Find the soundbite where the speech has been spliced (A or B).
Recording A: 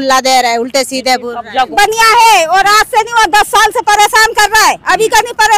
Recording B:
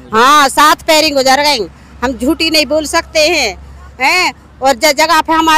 A